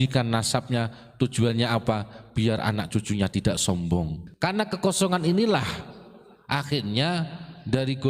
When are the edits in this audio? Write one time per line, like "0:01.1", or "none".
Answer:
0:04.2